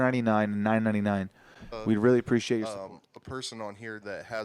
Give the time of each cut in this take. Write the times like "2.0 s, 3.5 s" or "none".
2.6 s

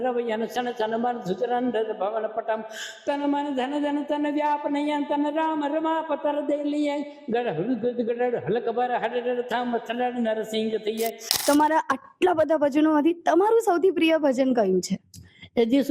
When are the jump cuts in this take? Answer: 11.2 s

